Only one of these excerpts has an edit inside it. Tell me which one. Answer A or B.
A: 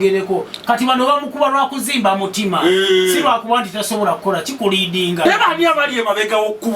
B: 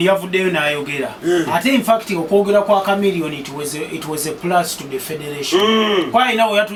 A